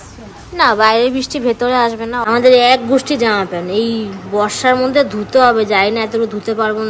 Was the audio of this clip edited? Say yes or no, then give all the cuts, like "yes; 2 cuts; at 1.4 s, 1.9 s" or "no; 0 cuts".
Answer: yes; 1 cut; at 2.2 s